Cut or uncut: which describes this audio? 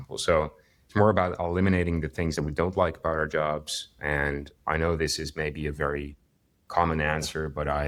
uncut